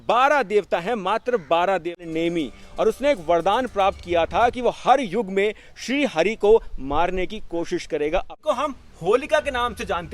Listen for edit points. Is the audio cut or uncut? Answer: cut